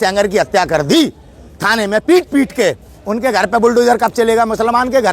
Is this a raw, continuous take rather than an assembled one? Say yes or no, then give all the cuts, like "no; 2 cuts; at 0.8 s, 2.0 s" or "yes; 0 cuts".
yes; 0 cuts